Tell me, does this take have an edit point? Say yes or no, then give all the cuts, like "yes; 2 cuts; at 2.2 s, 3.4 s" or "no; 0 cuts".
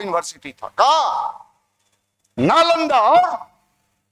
no; 0 cuts